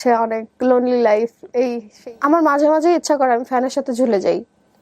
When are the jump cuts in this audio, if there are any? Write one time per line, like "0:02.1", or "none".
0:01.9

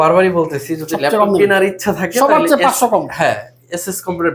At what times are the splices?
none

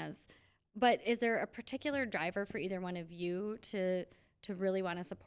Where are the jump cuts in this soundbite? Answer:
none

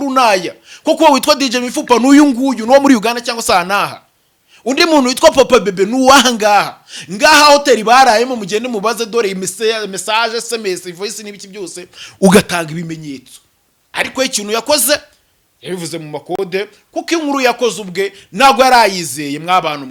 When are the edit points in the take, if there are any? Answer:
none

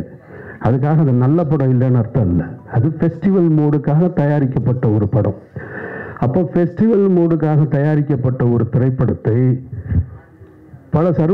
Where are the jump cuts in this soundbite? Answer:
none

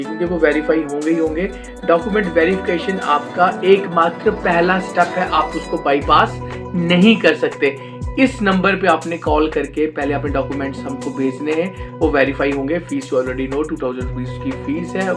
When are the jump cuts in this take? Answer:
none

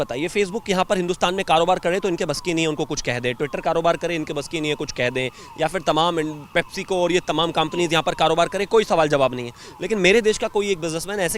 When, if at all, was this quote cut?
none

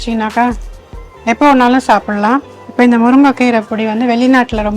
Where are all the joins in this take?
0:02.6

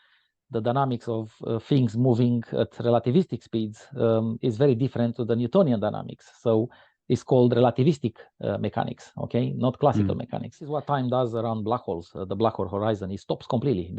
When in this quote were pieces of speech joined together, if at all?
0:10.7

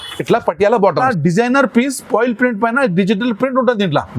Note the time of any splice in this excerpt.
0:01.1

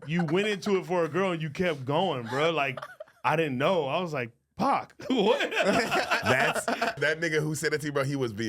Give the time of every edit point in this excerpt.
0:06.9

